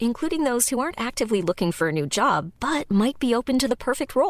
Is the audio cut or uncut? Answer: uncut